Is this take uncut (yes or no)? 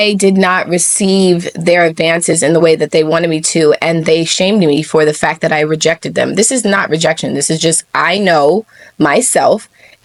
yes